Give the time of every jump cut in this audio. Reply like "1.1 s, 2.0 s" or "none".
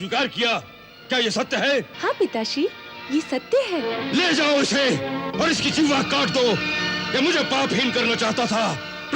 1.9 s, 4.0 s

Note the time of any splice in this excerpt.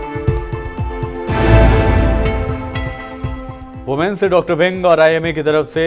1.3 s

